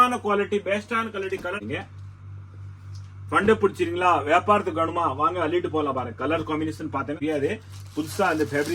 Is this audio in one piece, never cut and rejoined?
no; 2 cuts; at 1.6 s, 7.2 s

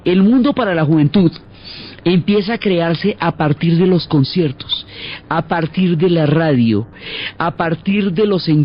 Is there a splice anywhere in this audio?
yes; 1 cut; at 2.7 s

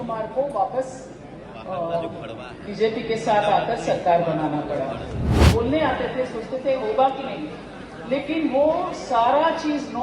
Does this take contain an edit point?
yes; 1 cut; at 5.3 s

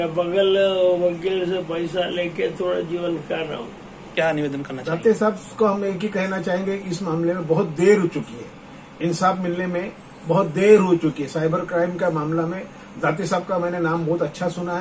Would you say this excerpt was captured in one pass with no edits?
no; 1 cut; at 4.0 s

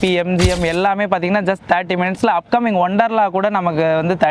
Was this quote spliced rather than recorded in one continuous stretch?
no; 0 cuts

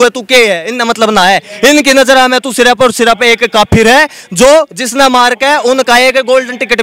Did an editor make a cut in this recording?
no; 0 cuts

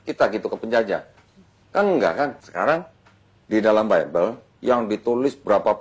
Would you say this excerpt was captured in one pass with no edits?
no; 1 cut; at 2.4 s

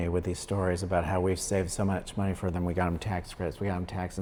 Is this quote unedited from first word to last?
yes; 0 cuts

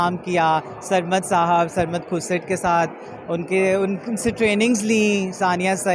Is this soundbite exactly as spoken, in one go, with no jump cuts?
yes; 0 cuts

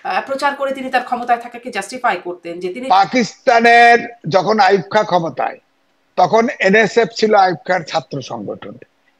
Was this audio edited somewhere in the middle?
yes; 1 cut; at 2.8 s

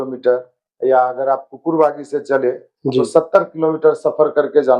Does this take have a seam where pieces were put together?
no; 0 cuts

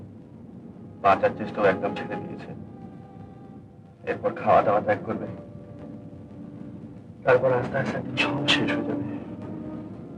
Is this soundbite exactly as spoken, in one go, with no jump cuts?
yes; 0 cuts

